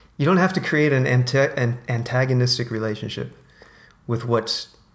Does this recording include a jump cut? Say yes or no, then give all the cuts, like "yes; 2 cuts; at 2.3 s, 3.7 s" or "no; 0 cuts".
no; 0 cuts